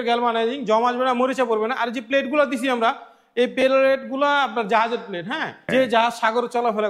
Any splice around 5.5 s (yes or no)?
yes